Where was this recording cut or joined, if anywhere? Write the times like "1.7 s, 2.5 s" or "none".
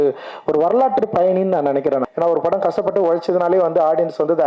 2.1 s